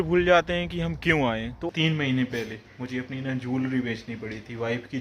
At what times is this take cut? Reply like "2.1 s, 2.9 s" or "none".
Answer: 1.7 s